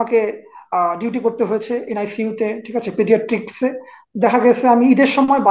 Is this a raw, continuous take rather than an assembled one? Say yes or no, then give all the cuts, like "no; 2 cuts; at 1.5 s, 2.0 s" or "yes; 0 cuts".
yes; 0 cuts